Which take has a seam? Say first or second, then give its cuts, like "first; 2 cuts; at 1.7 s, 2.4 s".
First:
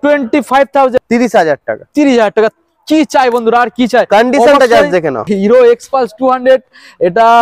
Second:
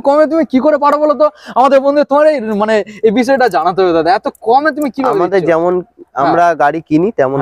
first; 2 cuts; at 1.0 s, 5.2 s